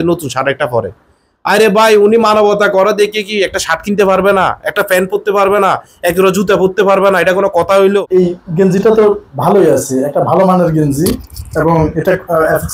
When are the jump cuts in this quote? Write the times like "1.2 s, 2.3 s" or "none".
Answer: 8.1 s